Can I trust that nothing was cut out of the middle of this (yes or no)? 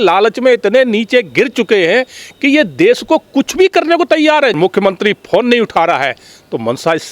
no